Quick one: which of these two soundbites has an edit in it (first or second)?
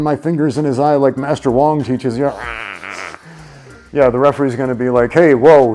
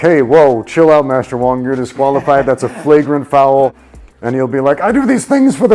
second